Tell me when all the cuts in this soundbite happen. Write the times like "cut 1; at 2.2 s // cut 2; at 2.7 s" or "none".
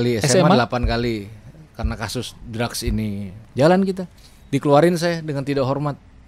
cut 1; at 3.4 s